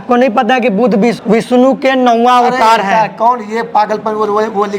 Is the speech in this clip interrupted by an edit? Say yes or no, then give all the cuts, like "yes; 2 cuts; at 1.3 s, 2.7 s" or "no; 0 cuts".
yes; 1 cut; at 1.2 s